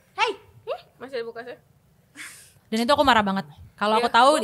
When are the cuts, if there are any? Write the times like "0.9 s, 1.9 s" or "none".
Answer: none

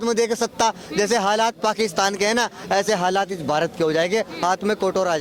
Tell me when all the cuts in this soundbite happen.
none

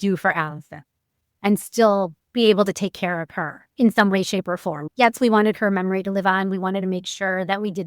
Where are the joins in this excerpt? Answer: 4.8 s

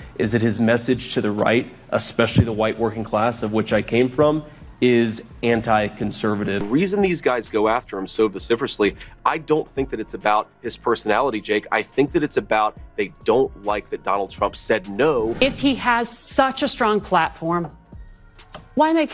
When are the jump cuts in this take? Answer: 6.6 s, 15.3 s

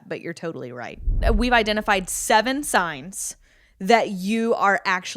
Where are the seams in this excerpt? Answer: 1.2 s

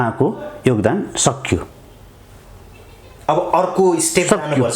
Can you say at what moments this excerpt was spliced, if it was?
none

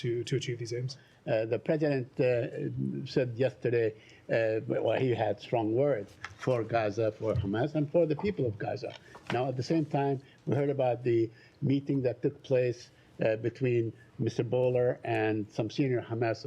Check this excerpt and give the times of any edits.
1.1 s

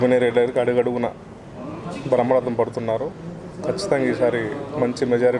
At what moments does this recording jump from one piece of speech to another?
none

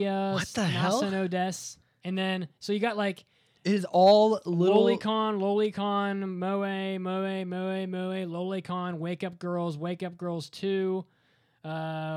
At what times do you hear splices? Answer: none

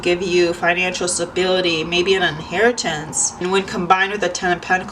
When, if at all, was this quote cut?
3.3 s

